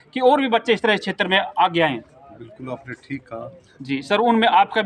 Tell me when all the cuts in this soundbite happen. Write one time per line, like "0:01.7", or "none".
0:03.7